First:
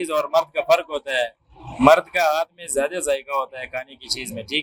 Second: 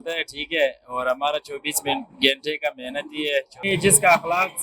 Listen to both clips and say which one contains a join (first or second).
second